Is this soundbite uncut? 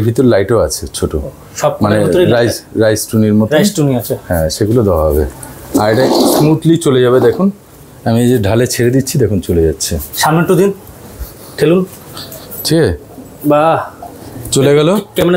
yes; 0 cuts

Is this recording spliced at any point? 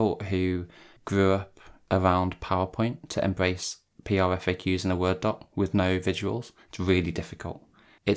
no; 0 cuts

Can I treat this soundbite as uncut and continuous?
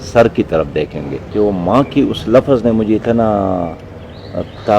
no; 1 cut; at 1.2 s

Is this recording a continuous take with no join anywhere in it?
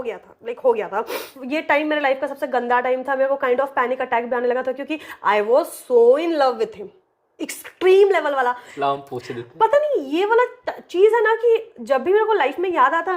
no; 2 cuts; at 1.3 s, 8.7 s

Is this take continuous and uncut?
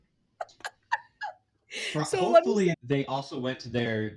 no; 1 cut; at 2.8 s

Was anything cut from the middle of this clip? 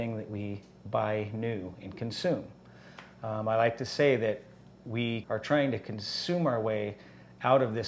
yes; 1 cut; at 5.2 s

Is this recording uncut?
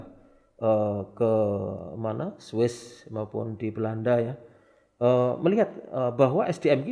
yes; 0 cuts

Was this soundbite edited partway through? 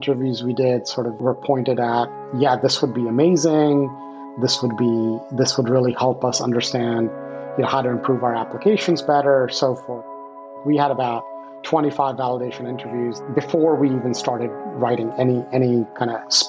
yes; 3 cuts; at 1.2 s, 10.2 s, 13.2 s

